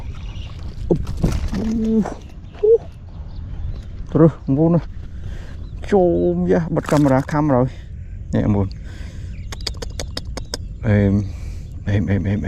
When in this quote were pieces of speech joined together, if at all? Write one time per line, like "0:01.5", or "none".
none